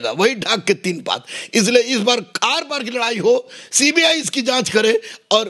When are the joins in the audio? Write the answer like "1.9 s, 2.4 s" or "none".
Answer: none

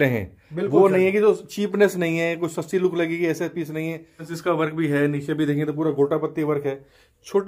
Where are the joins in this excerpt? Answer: 4.3 s

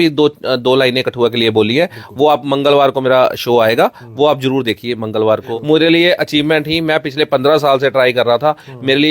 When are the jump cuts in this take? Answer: 5.5 s

